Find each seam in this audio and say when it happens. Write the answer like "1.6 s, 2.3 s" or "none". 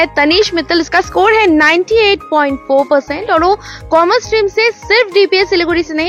none